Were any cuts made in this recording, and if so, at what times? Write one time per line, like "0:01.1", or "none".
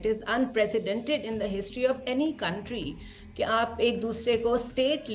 none